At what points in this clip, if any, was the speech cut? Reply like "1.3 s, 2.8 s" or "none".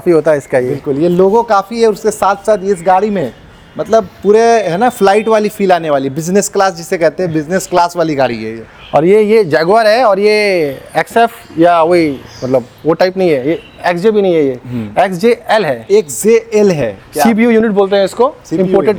none